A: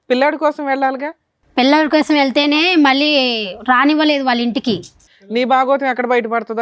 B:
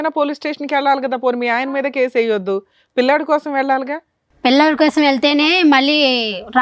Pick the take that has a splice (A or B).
A